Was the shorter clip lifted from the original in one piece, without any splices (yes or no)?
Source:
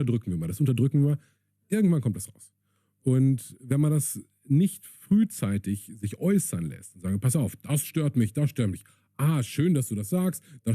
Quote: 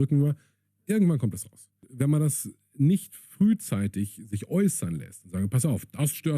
no